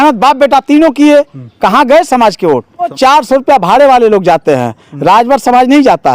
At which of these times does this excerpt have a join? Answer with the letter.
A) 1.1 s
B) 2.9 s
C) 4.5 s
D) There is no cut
B